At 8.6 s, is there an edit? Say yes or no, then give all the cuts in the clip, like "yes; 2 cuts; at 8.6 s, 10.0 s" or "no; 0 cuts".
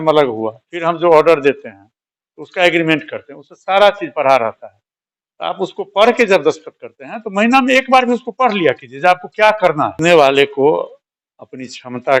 no; 1 cut; at 10.0 s